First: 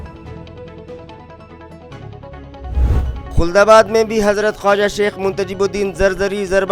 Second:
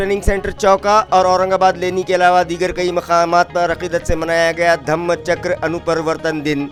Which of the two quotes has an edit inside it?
first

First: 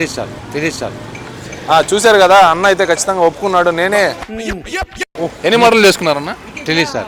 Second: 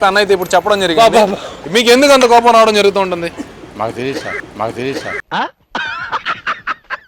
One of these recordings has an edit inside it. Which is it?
second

